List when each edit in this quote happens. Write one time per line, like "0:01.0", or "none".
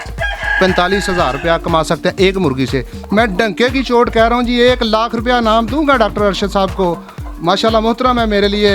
0:02.9